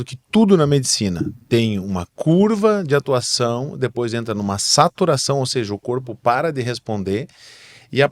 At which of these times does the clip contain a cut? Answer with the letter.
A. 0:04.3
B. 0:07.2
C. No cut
C